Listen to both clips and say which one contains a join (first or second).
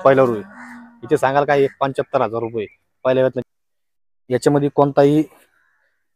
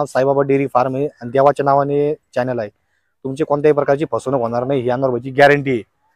first